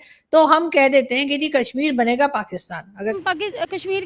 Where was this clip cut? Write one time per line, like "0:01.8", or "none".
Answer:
0:03.1

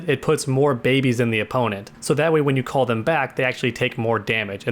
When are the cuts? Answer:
0:01.9

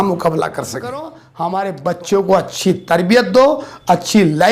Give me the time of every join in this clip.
0:01.2

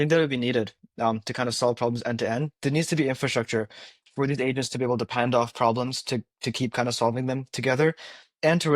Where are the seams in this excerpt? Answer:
none

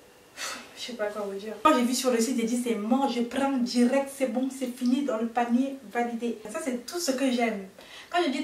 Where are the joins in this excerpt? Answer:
0:01.6
0:06.5

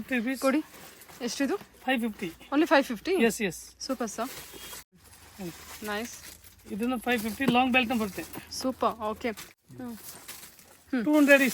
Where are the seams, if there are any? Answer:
0:04.9
0:09.5

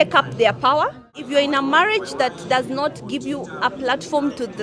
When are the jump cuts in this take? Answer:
0:01.1

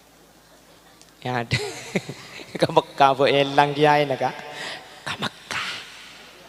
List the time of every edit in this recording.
none

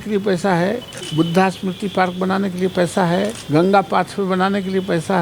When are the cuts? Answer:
0:01.0
0:03.4

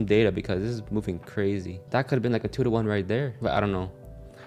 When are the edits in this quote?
none

